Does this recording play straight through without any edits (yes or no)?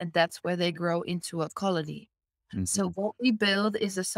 yes